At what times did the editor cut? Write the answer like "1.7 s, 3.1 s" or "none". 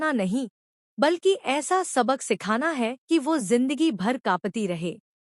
2.4 s